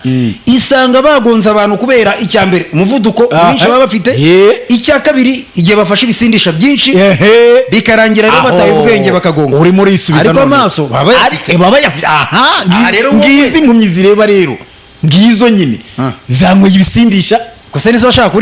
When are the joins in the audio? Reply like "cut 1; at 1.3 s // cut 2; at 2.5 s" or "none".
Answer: none